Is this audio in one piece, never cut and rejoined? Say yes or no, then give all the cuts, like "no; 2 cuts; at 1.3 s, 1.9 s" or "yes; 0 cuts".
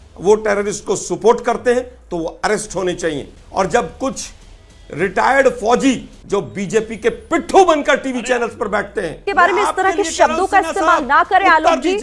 no; 3 cuts; at 3.3 s, 6.1 s, 9.2 s